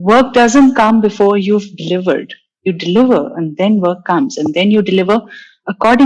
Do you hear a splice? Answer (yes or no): no